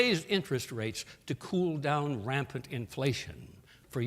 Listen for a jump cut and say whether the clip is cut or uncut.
cut